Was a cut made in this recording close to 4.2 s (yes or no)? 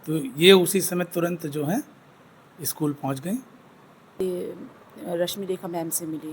yes